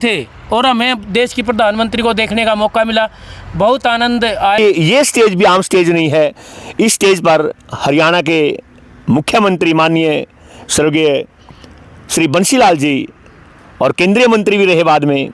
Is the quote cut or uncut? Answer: cut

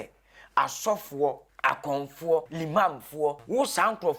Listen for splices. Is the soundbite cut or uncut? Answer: cut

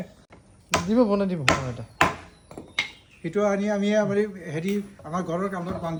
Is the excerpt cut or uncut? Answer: uncut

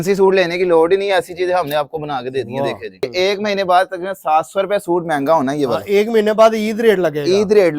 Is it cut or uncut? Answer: cut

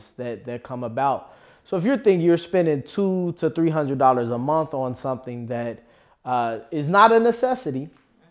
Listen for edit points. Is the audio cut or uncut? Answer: uncut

